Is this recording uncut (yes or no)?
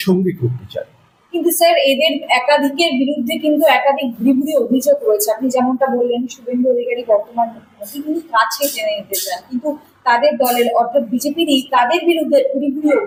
yes